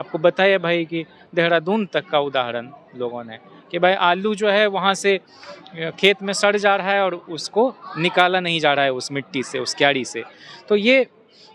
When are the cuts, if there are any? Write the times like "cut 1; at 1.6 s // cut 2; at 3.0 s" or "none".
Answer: none